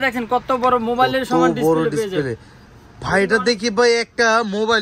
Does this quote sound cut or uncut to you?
uncut